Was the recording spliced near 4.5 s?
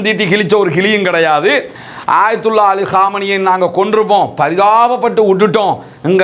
no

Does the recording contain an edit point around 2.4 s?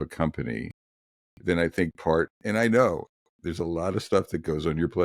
yes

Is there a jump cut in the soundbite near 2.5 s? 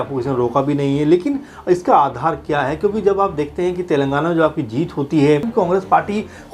no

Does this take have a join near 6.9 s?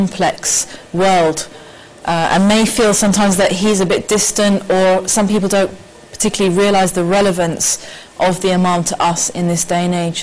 yes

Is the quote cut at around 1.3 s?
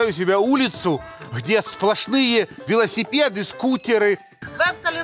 no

